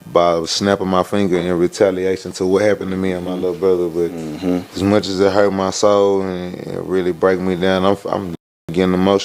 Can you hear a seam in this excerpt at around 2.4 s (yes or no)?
no